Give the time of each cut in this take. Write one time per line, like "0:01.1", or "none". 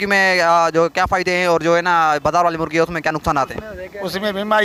none